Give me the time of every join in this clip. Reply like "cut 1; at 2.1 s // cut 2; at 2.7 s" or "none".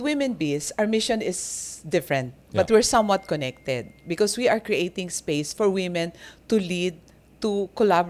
none